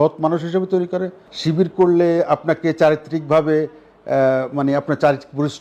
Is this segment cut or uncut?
cut